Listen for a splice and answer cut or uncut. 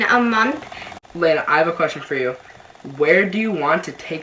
cut